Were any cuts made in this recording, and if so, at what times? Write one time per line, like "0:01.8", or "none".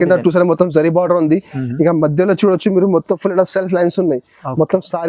none